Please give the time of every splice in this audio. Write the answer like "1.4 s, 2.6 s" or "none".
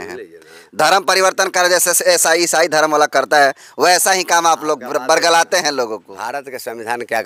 none

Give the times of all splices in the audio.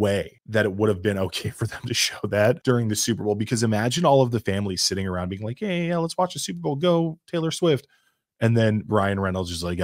none

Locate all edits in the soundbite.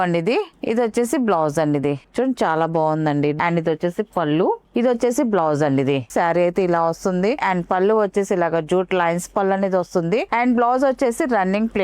2.1 s, 3.4 s, 6.1 s, 7.4 s, 10.3 s

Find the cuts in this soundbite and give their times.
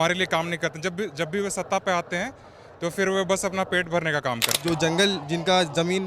4.5 s

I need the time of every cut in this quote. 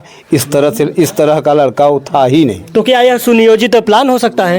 none

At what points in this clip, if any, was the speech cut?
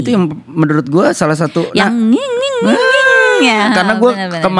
none

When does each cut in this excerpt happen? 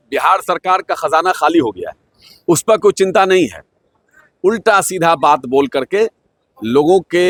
none

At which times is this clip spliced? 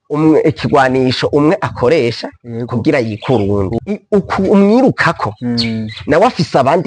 3.7 s

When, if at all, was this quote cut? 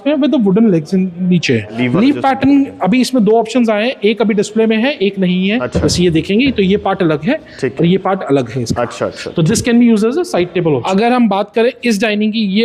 1.7 s, 5.7 s, 10.8 s

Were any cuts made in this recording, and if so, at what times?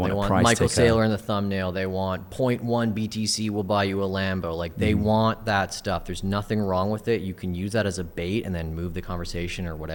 none

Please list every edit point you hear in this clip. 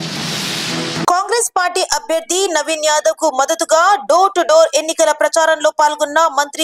1.1 s

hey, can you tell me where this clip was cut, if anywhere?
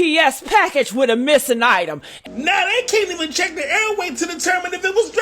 2.1 s

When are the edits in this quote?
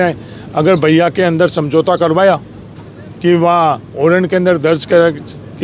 none

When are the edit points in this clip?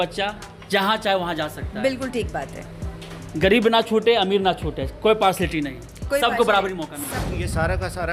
7.1 s

